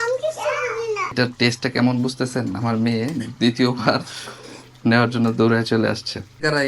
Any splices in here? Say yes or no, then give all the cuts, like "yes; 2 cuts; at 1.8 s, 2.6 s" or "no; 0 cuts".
yes; 1 cut; at 1.1 s